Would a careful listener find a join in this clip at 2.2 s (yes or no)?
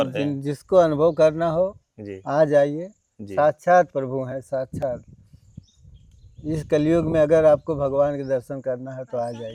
no